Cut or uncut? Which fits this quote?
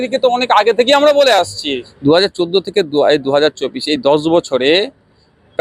cut